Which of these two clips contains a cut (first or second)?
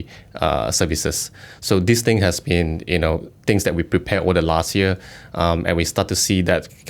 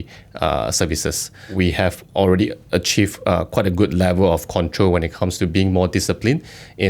second